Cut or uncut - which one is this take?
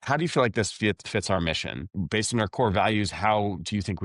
cut